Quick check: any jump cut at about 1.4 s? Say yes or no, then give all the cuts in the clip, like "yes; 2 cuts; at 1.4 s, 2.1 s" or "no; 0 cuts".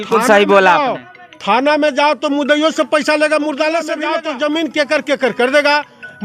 no; 1 cut; at 4.0 s